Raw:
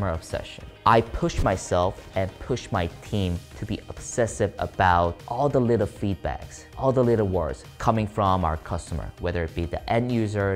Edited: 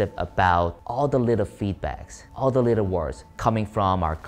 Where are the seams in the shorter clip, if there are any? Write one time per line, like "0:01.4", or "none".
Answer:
none